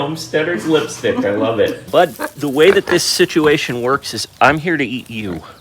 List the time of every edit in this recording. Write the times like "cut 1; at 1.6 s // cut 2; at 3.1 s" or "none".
cut 1; at 1.8 s